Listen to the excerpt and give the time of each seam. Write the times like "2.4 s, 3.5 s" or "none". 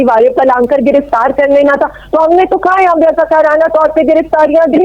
none